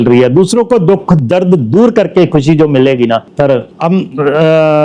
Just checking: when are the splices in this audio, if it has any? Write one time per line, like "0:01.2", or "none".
none